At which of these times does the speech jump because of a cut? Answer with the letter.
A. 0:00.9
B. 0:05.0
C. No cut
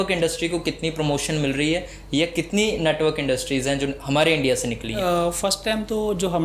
B